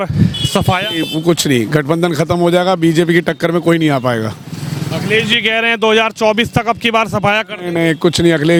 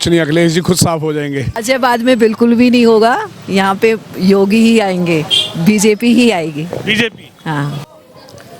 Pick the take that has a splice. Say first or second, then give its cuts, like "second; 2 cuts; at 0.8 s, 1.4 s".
second; 2 cuts; at 1.5 s, 7.8 s